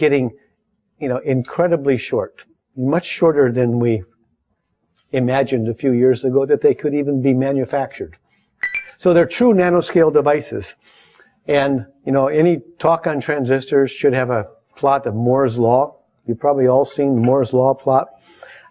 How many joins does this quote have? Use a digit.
1